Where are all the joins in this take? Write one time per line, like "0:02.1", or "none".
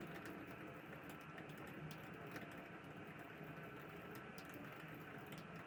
none